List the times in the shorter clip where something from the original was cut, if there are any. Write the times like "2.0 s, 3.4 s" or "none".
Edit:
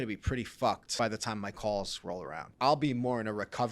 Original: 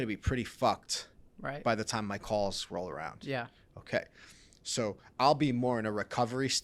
0.9 s, 2.5 s